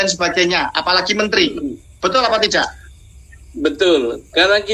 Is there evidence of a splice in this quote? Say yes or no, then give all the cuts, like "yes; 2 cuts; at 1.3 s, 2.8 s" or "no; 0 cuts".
no; 0 cuts